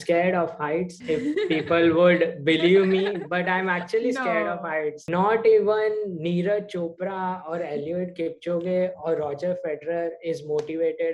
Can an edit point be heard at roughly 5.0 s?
yes; 2 cuts; at 0.9 s, 5.0 s

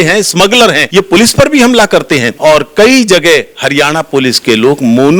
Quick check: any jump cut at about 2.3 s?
yes; 2 cuts; at 0.8 s, 2.3 s

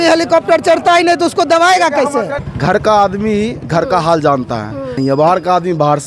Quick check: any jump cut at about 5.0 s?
yes; 2 cuts; at 2.4 s, 5.0 s

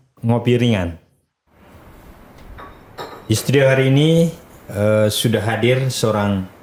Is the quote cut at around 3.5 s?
no; 0 cuts

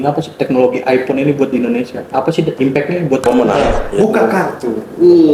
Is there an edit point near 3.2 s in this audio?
yes; 1 cut; at 3.2 s

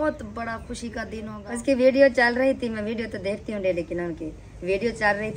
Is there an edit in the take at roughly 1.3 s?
yes; 1 cut; at 1.3 s

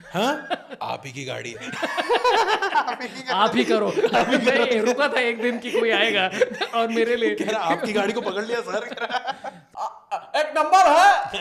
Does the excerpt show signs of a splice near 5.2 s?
no; 1 cut; at 9.6 s

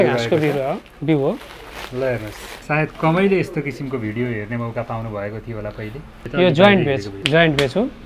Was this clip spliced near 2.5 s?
yes; 3 cuts; at 2.5 s, 6.2 s, 7.1 s

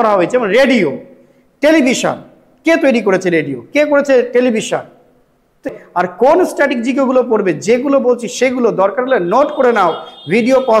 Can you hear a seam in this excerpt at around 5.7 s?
yes; 1 cut; at 5.7 s

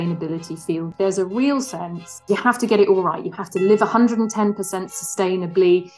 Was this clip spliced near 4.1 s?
no; 2 cuts; at 0.9 s, 2.2 s

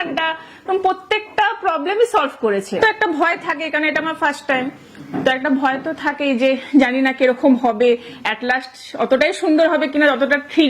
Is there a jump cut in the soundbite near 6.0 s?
no; 1 cut; at 2.8 s

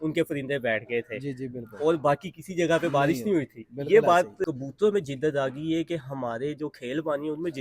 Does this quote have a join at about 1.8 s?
no; 1 cut; at 4.4 s

